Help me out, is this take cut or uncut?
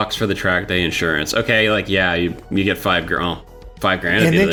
uncut